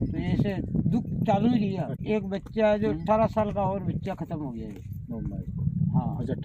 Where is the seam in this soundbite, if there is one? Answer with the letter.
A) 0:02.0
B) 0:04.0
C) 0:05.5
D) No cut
A